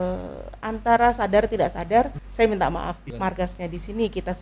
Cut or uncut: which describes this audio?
cut